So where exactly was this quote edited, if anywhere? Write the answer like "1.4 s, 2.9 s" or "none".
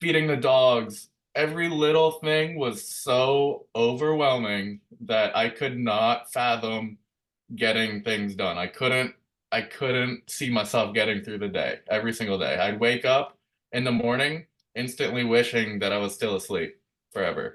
none